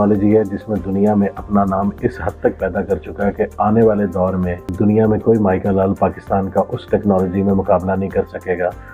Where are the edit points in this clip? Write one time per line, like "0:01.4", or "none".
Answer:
none